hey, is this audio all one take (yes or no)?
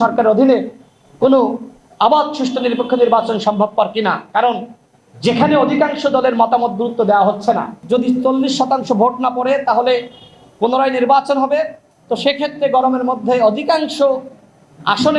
no